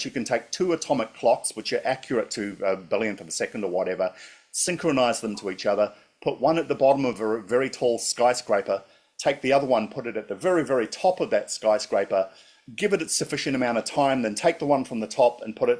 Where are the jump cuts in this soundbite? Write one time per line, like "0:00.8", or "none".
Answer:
none